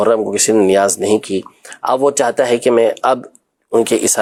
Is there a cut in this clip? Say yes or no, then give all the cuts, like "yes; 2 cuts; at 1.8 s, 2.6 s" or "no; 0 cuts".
no; 0 cuts